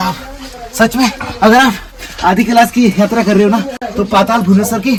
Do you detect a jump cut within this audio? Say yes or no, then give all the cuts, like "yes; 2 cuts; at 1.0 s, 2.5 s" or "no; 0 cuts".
no; 0 cuts